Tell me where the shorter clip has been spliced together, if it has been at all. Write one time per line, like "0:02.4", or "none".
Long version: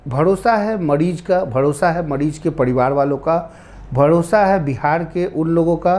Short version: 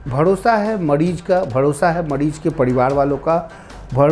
none